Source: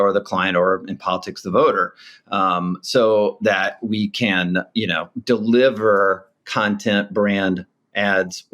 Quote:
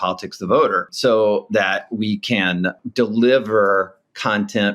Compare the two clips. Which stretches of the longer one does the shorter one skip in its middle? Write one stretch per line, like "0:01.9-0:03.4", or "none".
0:01.9-0:02.8
0:04.7-0:05.1